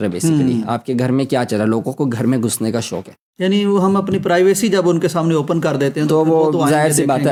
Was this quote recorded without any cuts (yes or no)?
yes